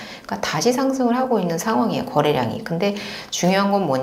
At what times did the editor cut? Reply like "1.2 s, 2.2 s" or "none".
none